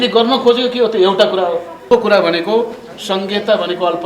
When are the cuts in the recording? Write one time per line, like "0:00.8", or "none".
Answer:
0:01.9